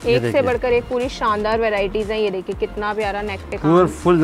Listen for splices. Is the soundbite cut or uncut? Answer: uncut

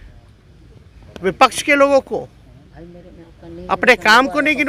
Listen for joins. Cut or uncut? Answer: uncut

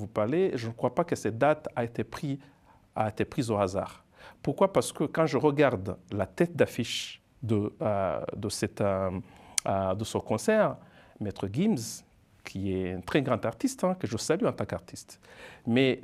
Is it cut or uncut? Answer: uncut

